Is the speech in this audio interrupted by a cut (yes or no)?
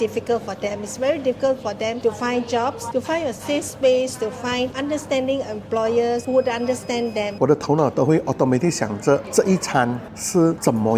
yes